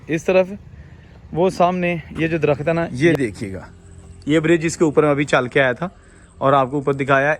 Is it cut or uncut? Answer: cut